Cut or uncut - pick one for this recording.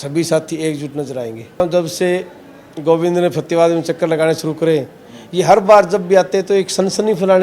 cut